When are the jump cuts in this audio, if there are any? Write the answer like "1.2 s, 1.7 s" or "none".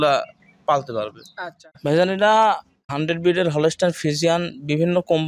1.6 s, 2.8 s